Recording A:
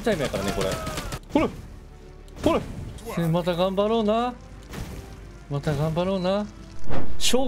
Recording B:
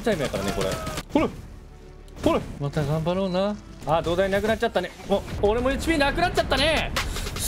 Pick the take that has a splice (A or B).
B